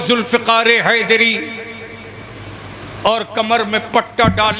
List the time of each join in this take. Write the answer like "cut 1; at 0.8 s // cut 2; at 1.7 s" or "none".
none